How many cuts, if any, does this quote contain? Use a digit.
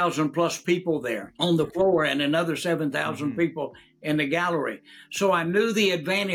1